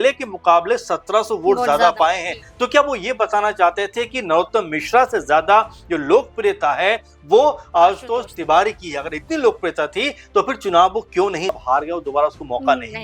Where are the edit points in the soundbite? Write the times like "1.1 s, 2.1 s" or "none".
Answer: 11.6 s

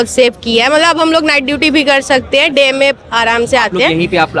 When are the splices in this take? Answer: none

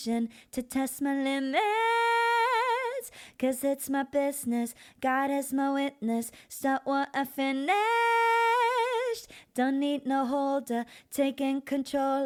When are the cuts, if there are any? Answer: none

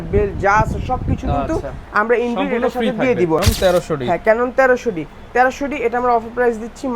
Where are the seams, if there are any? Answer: 3.4 s

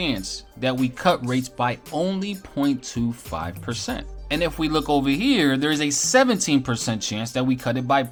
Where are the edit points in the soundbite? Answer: none

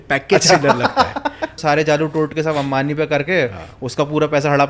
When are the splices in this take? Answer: 1.5 s

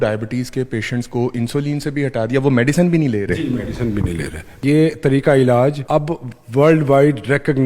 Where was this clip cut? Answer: 4.6 s, 5.8 s

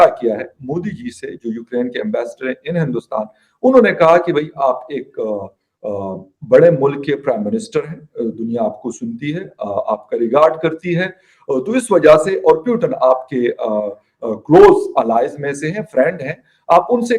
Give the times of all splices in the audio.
none

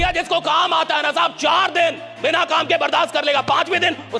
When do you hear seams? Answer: none

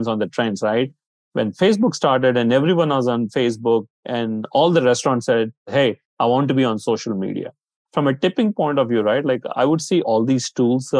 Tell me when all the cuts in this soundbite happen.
4.0 s, 5.7 s, 7.8 s, 10.0 s

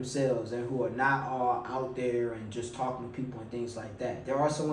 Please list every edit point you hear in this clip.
none

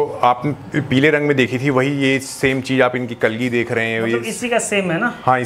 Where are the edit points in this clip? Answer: none

